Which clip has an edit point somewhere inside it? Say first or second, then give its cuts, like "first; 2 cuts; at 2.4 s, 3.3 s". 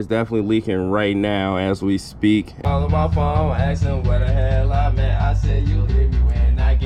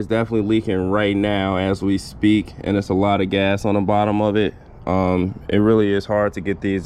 first; 1 cut; at 2.6 s